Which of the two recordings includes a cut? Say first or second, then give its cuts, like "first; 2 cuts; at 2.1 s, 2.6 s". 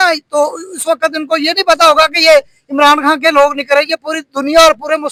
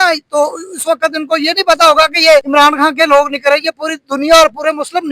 second; 1 cut; at 2.5 s